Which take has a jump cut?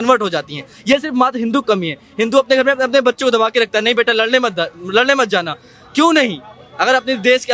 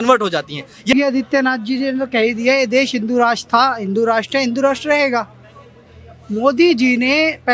second; 1 cut; at 0.9 s

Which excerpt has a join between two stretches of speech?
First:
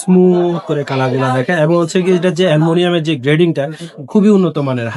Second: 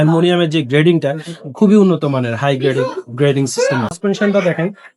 second; 1 cut; at 4.0 s

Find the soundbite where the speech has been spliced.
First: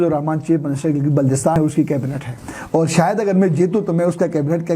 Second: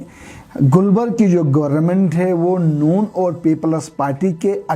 first; 1 cut; at 1.6 s

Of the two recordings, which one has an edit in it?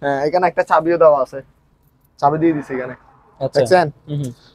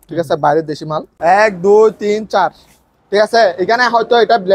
second; 1 cut; at 1.1 s

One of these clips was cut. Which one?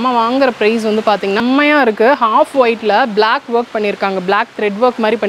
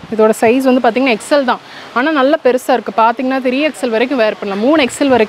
first; 1 cut; at 1.4 s

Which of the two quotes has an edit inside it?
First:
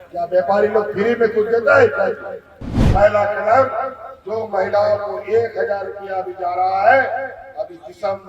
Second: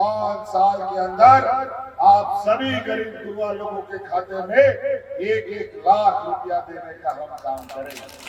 first; 1 cut; at 2.9 s

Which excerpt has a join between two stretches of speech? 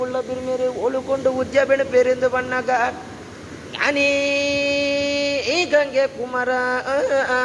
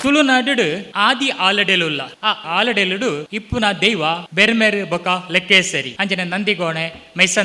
second; 5 cuts; at 0.9 s, 2.4 s, 3.3 s, 4.3 s, 5.9 s

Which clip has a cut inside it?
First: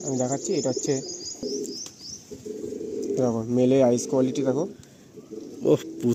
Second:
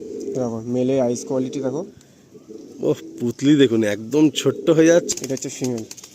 second; 1 cut; at 5.1 s

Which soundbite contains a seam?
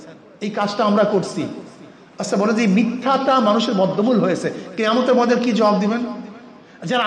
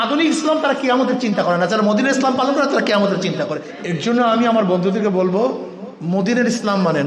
second; 1 cut; at 3.7 s

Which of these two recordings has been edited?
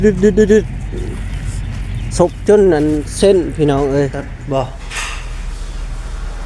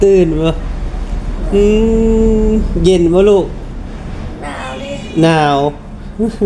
first; 1 cut; at 4.3 s

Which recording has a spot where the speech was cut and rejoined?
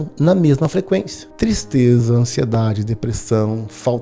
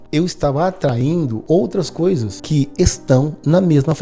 second; 2 cuts; at 1.4 s, 2.3 s

